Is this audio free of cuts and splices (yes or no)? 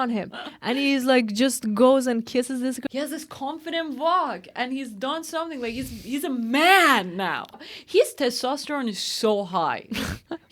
no